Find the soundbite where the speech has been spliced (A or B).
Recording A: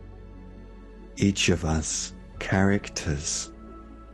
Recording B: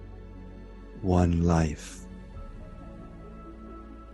A